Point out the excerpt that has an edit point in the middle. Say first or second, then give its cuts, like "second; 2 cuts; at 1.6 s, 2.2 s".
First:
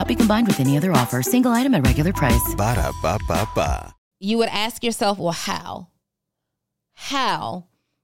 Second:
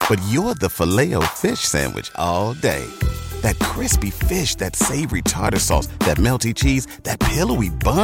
first; 1 cut; at 3.9 s